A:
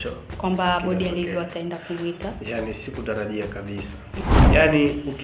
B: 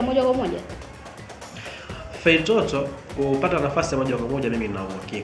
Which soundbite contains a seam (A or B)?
A